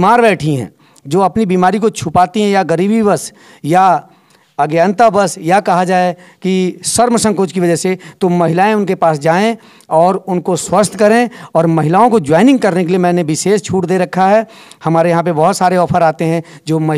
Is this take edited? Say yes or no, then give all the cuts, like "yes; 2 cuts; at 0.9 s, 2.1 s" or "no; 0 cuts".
no; 0 cuts